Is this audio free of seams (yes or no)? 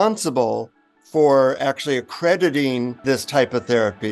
no